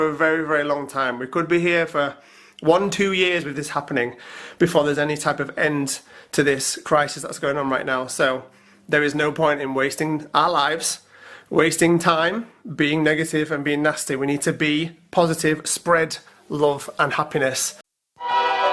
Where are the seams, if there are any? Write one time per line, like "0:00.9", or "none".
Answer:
0:17.7